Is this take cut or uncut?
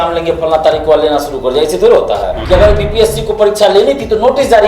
cut